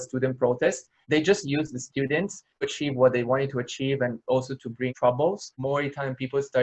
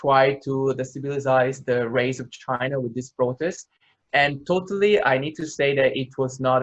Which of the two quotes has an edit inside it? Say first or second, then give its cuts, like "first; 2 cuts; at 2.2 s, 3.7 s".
first; 2 cuts; at 1.0 s, 5.5 s